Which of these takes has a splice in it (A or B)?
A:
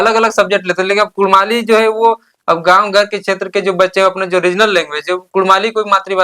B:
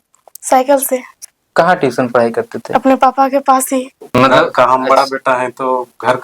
B